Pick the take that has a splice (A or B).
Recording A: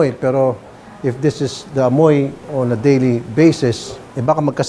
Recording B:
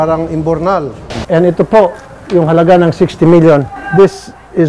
B